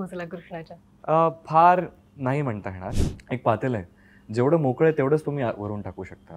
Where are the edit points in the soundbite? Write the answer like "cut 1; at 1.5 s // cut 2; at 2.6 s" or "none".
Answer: cut 1; at 2.9 s